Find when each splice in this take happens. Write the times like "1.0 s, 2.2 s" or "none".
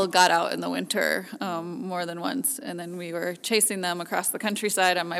none